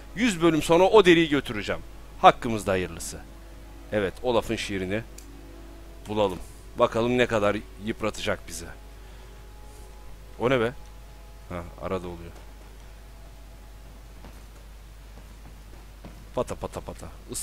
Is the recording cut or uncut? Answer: uncut